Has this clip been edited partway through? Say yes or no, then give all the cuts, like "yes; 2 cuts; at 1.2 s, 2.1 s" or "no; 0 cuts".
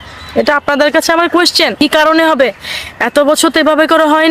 yes; 1 cut; at 1.8 s